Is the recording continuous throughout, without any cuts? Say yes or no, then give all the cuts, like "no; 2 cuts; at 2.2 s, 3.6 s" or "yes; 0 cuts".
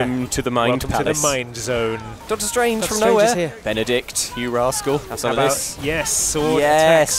no; 3 cuts; at 2.2 s, 3.6 s, 5.1 s